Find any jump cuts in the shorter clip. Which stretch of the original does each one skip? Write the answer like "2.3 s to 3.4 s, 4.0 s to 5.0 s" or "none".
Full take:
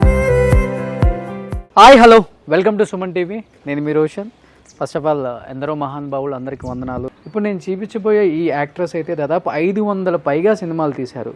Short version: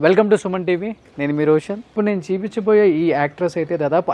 4.3 s to 7.2 s